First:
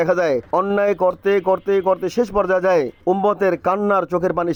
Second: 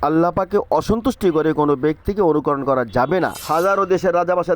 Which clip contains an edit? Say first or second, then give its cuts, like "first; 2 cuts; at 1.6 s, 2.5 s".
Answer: second; 1 cut; at 3.4 s